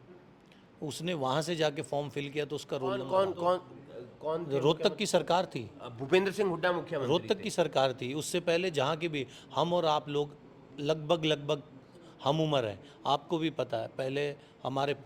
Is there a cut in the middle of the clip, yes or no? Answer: yes